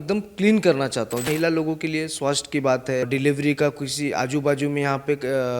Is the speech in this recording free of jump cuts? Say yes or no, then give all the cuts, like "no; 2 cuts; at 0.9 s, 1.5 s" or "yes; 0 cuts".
no; 2 cuts; at 1.2 s, 3.0 s